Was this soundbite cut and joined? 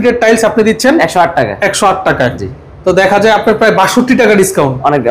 no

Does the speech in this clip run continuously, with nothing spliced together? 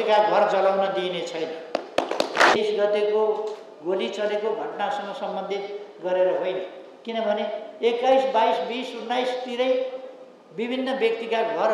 no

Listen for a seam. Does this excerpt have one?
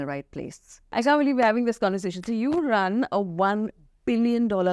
yes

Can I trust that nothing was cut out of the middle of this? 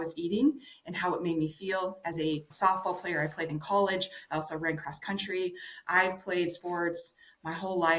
no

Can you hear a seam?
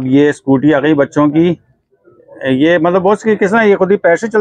no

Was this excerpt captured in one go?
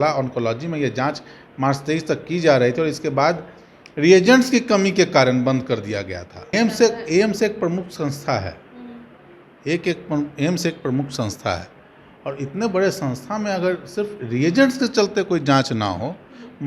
no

